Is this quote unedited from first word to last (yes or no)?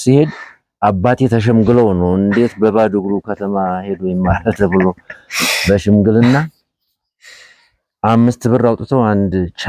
yes